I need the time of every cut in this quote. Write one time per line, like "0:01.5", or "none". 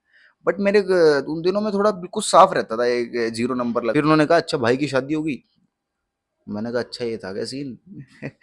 0:03.9

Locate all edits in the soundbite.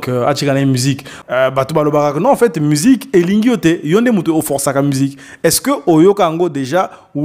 0:01.1

